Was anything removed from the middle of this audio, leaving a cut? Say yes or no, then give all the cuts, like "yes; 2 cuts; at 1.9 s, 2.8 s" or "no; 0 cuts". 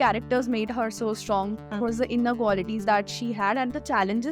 no; 0 cuts